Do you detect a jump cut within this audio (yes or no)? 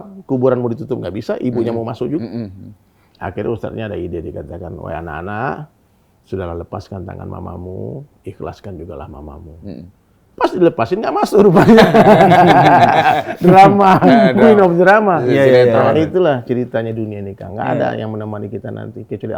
no